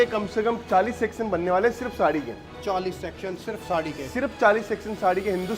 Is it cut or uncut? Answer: uncut